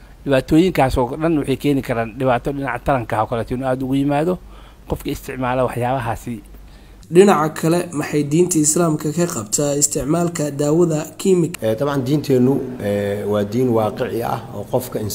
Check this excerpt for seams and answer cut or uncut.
cut